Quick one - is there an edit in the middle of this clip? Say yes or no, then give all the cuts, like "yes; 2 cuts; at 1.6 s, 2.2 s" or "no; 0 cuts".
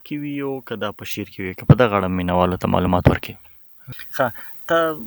no; 0 cuts